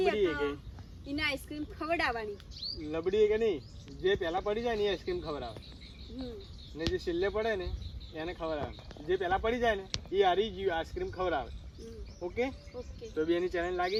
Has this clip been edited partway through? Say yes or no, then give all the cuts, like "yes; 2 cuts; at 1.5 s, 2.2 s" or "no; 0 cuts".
no; 0 cuts